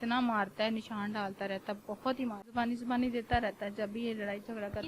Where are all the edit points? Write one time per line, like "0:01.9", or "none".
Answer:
0:02.5